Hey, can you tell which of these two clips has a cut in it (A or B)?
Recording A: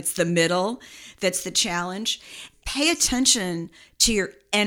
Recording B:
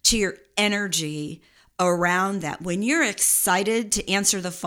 A